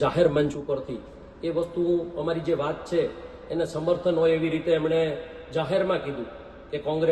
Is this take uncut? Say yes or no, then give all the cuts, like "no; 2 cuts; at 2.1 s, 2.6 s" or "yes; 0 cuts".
yes; 0 cuts